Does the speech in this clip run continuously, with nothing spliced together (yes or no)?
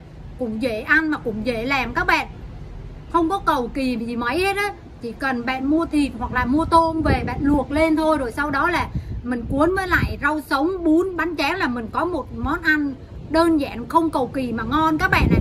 yes